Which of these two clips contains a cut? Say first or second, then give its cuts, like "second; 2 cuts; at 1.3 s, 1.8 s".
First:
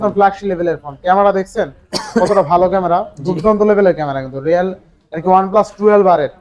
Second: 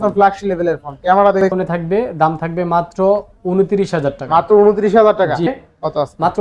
second; 2 cuts; at 1.5 s, 5.5 s